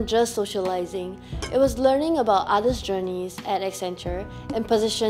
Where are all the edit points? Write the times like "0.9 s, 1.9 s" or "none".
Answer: none